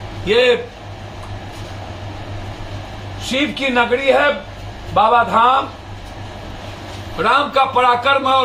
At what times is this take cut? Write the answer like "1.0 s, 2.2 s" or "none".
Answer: none